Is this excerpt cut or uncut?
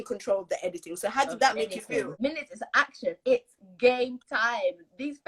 cut